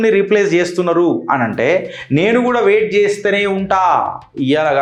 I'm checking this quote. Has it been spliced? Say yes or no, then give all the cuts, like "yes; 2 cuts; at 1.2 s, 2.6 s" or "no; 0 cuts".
no; 0 cuts